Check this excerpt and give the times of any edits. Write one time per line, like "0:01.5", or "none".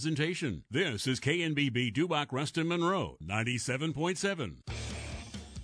0:04.7